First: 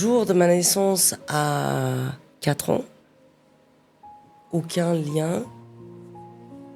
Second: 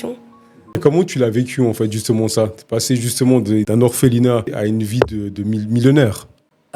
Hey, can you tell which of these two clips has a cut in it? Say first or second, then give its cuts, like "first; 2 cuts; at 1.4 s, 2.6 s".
second; 3 cuts; at 0.8 s, 3.7 s, 4.5 s